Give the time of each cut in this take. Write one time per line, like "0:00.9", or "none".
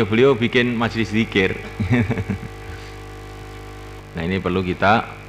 0:04.3